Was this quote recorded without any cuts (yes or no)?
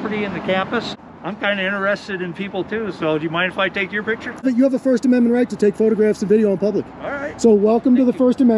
no